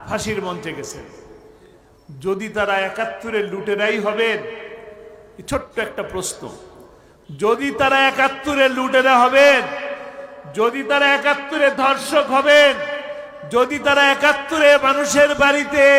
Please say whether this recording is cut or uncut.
uncut